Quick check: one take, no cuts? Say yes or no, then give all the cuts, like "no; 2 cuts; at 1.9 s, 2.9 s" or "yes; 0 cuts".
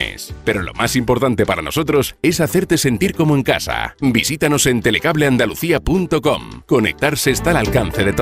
no; 1 cut; at 6.5 s